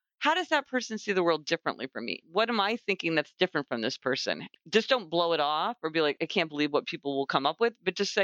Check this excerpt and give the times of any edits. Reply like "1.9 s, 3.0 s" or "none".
2.2 s, 4.4 s, 6.2 s